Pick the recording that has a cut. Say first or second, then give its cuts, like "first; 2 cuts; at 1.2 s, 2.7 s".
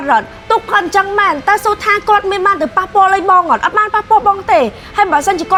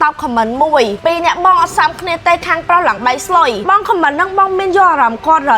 second; 2 cuts; at 1.0 s, 3.6 s